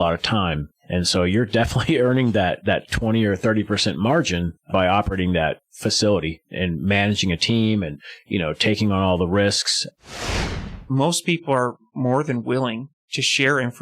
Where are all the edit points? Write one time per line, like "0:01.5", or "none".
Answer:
0:10.2